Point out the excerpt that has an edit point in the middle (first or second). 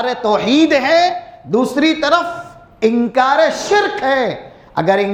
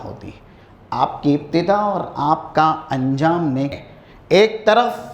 second